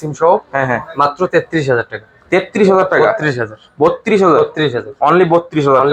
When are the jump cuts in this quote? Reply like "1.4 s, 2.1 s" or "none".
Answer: none